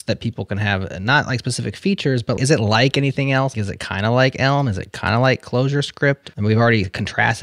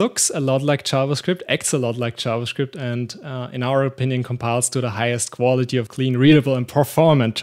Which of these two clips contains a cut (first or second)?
first